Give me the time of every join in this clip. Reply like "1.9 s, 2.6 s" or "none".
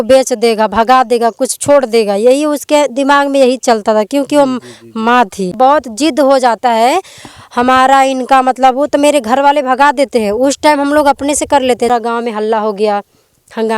5.5 s, 11.9 s

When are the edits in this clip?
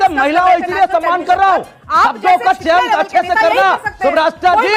none

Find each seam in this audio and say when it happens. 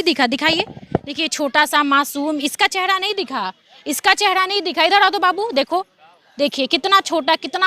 none

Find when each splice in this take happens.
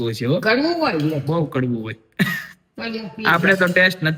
none

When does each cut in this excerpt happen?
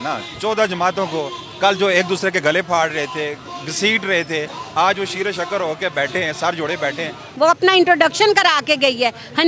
7.2 s

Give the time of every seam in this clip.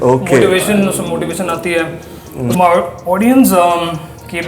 2.5 s

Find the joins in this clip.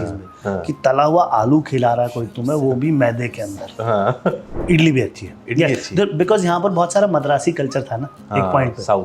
4.5 s

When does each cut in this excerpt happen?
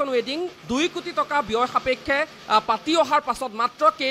none

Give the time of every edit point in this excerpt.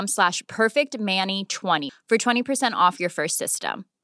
1.8 s

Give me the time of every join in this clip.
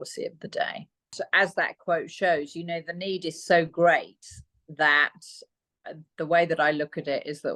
1.1 s

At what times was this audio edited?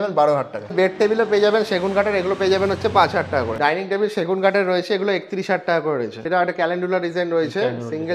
0.7 s, 3.5 s, 6.2 s

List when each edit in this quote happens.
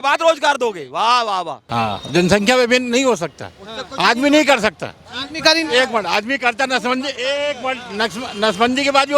1.6 s

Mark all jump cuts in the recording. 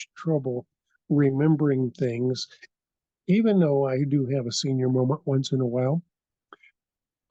none

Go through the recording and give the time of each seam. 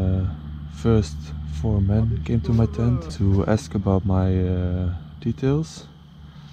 3.1 s

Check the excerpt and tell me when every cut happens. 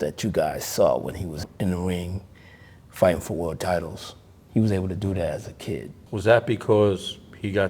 1.4 s, 6.0 s

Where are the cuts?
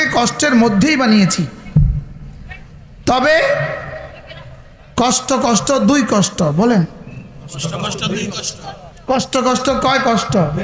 none

